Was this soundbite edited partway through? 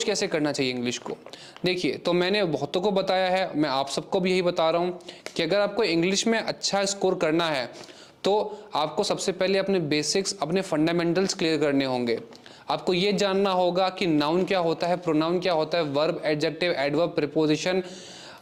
no; 0 cuts

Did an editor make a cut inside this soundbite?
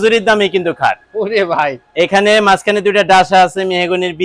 no; 0 cuts

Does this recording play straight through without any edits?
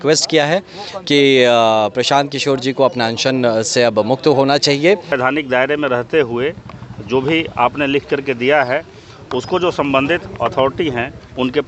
no; 1 cut; at 5.1 s

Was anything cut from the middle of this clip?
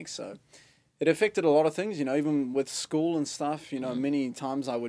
no; 0 cuts

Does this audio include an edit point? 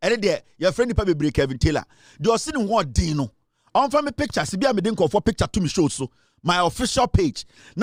no; 0 cuts

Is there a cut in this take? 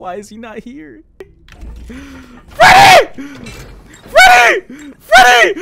yes; 1 cut; at 1.4 s

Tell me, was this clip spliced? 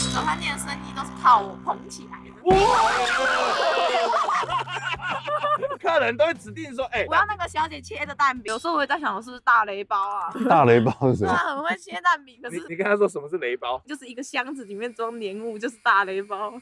no; 0 cuts

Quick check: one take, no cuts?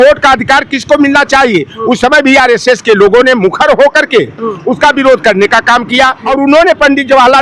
no; 1 cut; at 6.2 s

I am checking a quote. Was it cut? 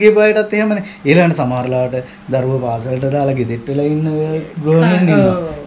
no; 0 cuts

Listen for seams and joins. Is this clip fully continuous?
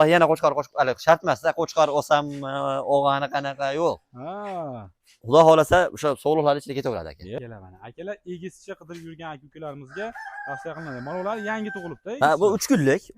no; 1 cut; at 7.4 s

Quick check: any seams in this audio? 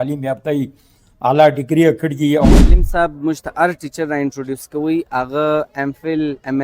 yes; 1 cut; at 2.5 s

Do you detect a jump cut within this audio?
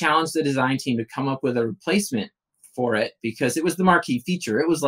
no; 0 cuts

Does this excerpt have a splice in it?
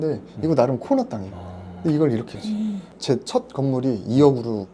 yes; 1 cut; at 2.9 s

